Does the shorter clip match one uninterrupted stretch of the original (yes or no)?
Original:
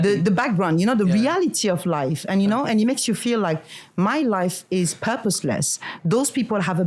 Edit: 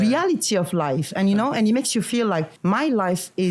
no